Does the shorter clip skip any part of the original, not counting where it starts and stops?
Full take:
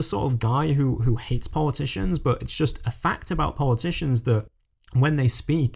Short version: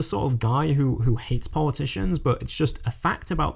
no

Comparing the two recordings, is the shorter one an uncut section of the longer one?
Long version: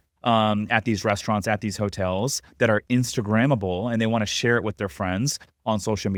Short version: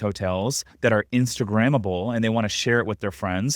yes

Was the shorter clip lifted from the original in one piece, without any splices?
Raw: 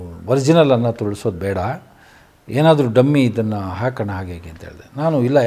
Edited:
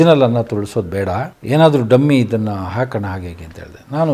no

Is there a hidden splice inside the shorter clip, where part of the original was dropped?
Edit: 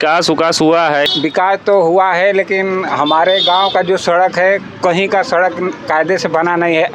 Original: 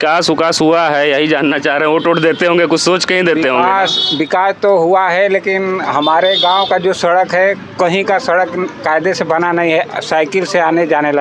yes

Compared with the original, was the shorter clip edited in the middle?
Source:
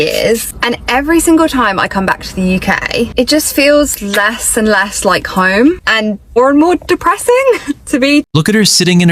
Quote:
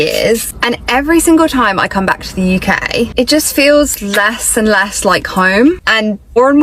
no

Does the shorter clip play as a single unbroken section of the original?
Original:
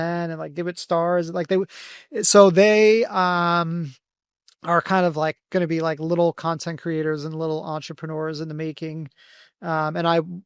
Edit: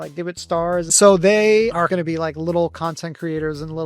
no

